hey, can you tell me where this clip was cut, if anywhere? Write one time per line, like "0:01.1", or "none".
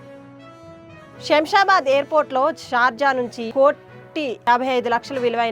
none